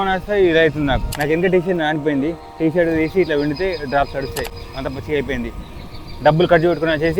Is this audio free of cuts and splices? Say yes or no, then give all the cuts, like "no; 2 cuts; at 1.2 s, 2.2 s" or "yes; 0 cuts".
no; 1 cut; at 1.1 s